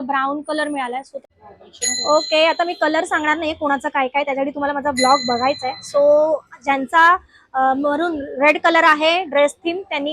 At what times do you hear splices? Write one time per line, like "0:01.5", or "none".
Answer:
0:01.4